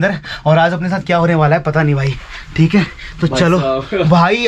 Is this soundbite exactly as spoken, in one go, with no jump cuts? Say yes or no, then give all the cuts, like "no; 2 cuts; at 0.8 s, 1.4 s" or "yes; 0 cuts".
yes; 0 cuts